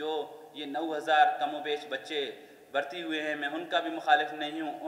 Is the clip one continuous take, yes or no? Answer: yes